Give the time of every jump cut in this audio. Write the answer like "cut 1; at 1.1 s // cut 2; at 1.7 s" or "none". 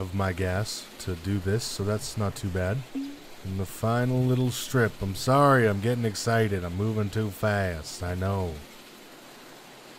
cut 1; at 3.3 s